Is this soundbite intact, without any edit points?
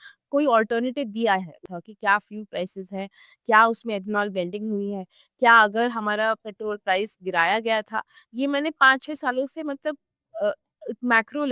no; 1 cut; at 1.6 s

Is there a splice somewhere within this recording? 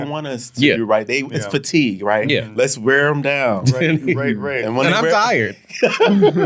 no; 0 cuts

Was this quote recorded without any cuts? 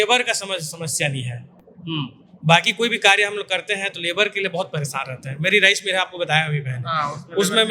yes; 0 cuts

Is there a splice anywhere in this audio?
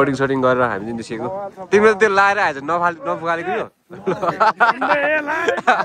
no; 0 cuts

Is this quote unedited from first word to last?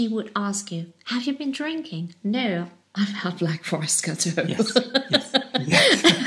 yes; 0 cuts

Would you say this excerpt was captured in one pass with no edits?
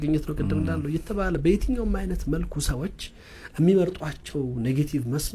yes; 0 cuts

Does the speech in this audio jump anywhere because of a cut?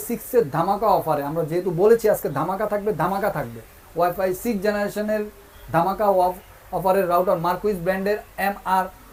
no; 0 cuts

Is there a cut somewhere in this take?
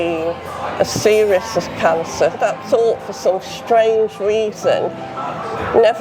yes; 1 cut; at 2.3 s

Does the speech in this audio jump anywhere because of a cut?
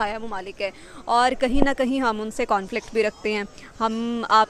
no; 0 cuts

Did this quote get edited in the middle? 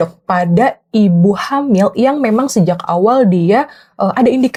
no; 0 cuts

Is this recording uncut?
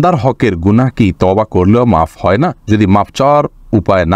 yes; 0 cuts

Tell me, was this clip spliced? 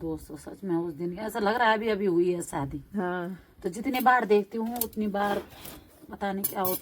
no; 0 cuts

